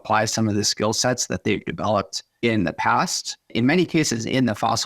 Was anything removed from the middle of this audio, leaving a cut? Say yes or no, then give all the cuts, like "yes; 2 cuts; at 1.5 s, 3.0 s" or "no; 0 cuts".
yes; 2 cuts; at 2.2 s, 3.5 s